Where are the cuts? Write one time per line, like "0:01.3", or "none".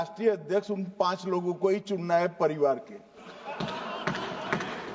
none